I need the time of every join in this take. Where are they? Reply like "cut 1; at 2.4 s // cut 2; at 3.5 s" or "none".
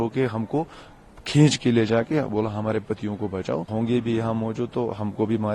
cut 1; at 3.7 s